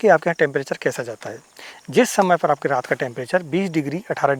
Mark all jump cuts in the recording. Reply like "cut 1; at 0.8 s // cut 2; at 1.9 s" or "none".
none